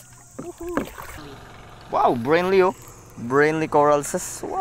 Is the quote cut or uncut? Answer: cut